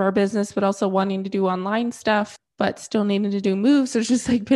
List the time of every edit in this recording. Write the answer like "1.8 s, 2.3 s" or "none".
2.4 s